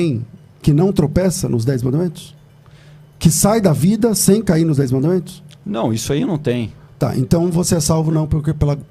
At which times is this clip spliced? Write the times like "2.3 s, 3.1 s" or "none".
none